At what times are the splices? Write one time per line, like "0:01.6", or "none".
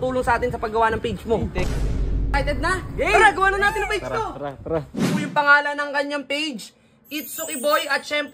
0:01.9
0:05.0